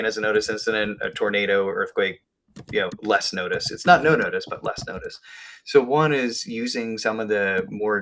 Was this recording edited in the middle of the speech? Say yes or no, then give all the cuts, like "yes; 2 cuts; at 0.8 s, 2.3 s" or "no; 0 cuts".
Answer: yes; 1 cut; at 1.5 s